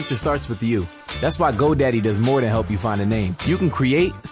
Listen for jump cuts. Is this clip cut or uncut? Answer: cut